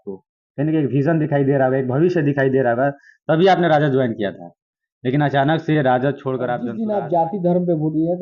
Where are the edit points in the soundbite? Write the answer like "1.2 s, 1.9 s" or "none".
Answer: 6.7 s